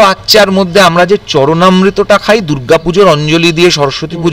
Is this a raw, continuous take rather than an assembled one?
yes; 0 cuts

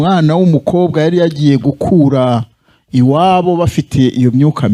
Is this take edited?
no; 0 cuts

